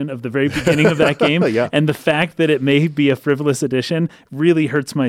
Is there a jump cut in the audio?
no; 0 cuts

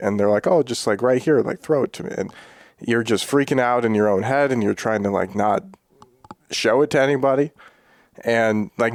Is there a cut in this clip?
no; 0 cuts

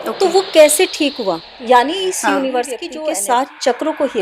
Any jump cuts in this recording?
yes; 1 cut; at 2.9 s

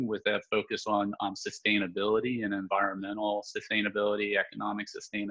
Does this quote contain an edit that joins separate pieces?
no; 0 cuts

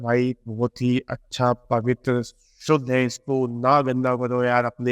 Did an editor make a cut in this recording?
no; 0 cuts

